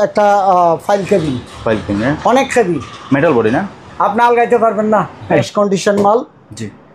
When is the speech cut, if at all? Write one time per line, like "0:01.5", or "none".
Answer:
0:05.4